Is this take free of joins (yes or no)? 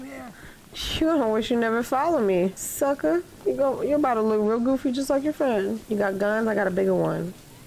no